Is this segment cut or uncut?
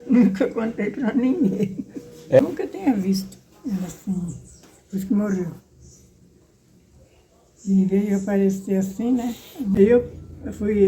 cut